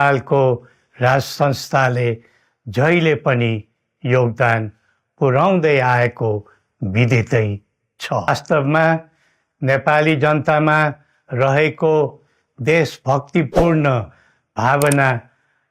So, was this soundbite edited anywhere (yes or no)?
yes